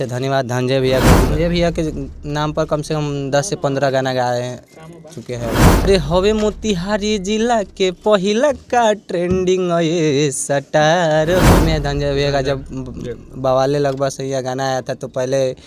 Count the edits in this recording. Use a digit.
3